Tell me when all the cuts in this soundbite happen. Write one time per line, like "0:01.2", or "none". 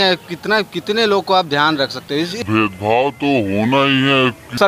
none